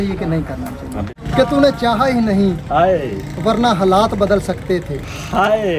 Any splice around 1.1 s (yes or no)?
yes